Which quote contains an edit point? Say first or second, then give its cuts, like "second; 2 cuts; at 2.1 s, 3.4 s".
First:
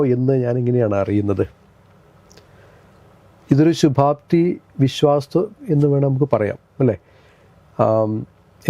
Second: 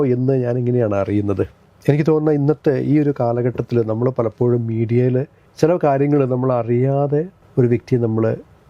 second; 3 cuts; at 1.7 s, 5.4 s, 7.4 s